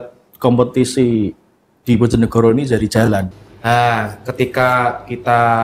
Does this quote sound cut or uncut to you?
cut